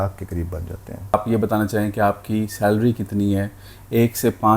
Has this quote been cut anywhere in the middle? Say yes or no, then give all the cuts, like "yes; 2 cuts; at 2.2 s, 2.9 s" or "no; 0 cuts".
yes; 1 cut; at 1.1 s